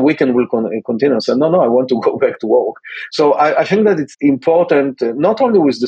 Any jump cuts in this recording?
yes; 1 cut; at 4.1 s

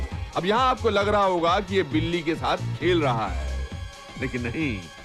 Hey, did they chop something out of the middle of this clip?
no; 0 cuts

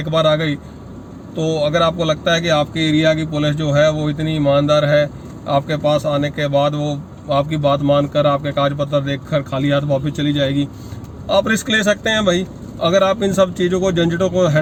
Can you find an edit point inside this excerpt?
no; 0 cuts

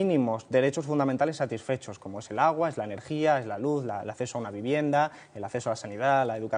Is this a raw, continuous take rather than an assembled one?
yes; 0 cuts

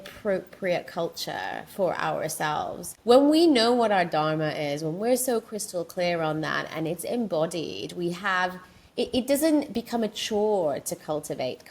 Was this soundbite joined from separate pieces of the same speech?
yes; 1 cut; at 2.9 s

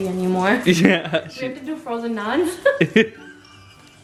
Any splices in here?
no; 0 cuts

